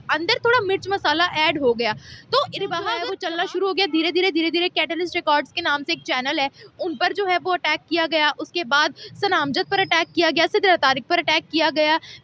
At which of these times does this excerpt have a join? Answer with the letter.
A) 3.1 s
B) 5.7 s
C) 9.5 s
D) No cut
A